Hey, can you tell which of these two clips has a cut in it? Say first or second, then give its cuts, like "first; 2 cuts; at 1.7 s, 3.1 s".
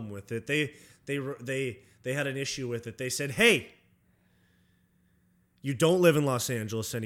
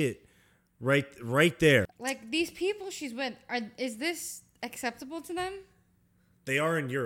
second; 1 cut; at 2.0 s